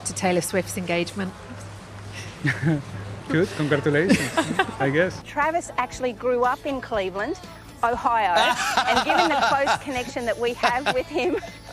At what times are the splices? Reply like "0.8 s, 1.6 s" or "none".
5.2 s